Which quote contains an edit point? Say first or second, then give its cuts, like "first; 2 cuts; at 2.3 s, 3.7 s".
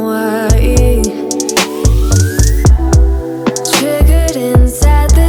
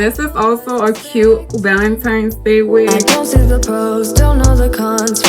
second; 1 cut; at 3.0 s